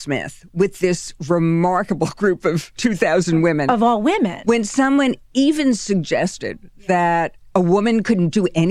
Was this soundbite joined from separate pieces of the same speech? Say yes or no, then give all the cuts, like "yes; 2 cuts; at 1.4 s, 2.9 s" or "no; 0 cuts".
no; 0 cuts